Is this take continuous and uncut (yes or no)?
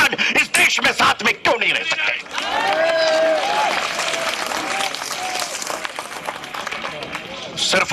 yes